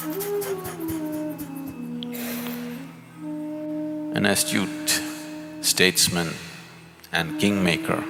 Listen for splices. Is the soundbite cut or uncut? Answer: uncut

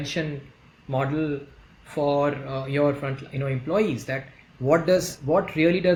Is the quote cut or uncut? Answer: uncut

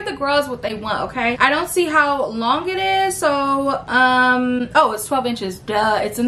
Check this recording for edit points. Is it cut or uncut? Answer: cut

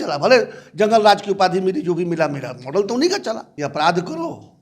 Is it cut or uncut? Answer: cut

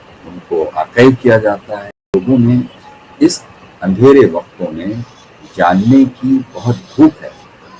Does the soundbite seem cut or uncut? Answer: cut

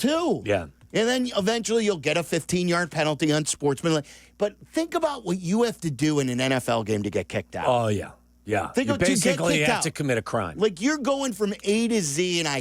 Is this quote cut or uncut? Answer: uncut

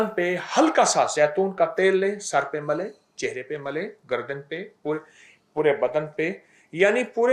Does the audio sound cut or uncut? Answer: uncut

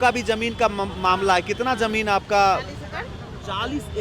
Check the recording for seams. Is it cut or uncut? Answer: uncut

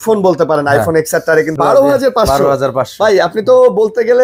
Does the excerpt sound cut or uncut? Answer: cut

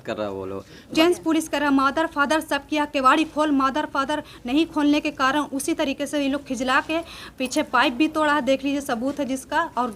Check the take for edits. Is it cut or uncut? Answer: cut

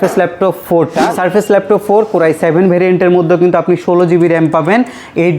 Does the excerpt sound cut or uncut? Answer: cut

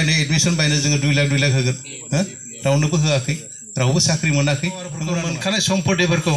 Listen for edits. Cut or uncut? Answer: cut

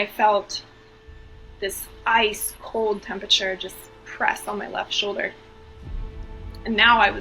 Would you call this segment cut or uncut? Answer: uncut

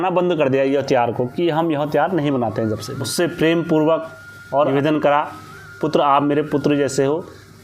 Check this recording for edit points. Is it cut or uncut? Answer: cut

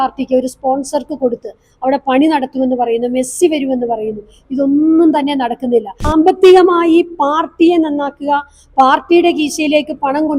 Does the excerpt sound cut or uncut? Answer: cut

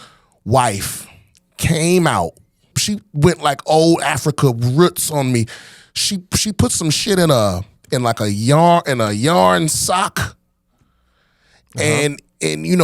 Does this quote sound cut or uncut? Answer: cut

